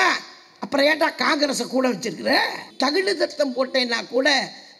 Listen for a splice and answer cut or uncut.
cut